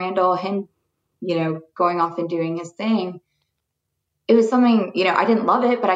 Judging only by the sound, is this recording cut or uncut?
uncut